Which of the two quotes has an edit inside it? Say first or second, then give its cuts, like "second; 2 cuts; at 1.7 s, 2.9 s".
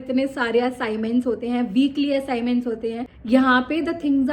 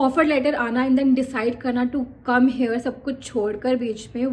first; 1 cut; at 3.1 s